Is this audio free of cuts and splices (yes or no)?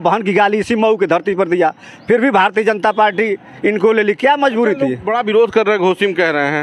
yes